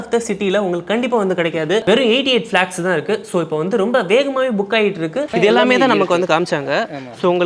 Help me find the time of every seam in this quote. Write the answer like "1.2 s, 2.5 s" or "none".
1.8 s, 5.3 s